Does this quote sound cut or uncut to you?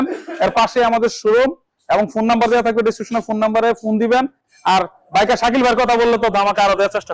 uncut